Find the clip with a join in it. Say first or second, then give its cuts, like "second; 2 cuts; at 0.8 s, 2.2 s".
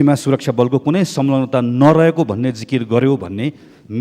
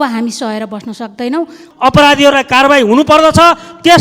second; 1 cut; at 1.6 s